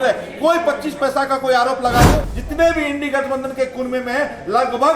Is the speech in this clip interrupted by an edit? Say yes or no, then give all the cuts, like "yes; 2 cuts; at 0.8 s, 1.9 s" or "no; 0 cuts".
yes; 1 cut; at 2.3 s